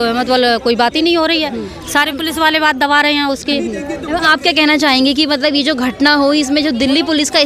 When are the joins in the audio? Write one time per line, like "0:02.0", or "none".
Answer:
none